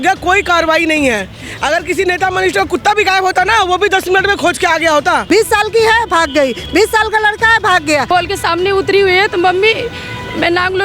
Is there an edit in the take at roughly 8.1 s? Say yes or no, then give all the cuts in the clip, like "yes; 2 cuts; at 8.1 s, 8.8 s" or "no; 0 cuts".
yes; 2 cuts; at 5.2 s, 8.1 s